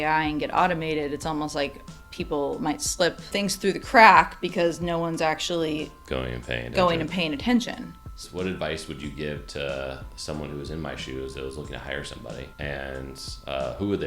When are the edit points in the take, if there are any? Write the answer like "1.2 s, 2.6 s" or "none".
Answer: 3.3 s, 8.2 s, 12.5 s